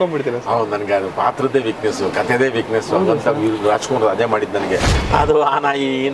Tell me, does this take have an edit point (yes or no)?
yes